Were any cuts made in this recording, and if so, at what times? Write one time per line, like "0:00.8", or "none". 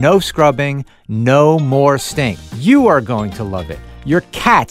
0:02.4